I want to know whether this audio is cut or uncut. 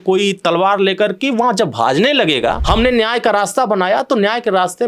cut